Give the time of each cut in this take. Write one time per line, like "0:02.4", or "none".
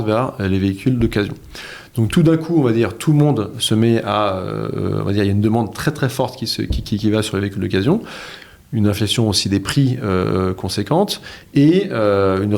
none

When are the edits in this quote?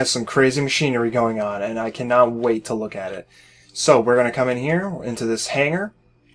0:02.4

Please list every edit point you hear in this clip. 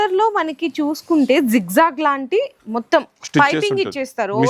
none

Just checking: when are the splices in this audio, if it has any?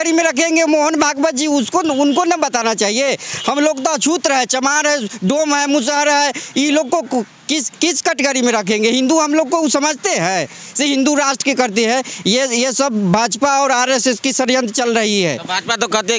none

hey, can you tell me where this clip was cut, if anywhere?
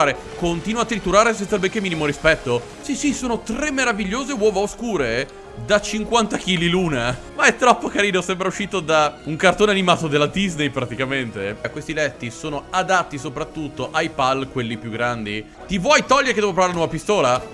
0:02.8
0:07.2
0:11.7
0:15.5

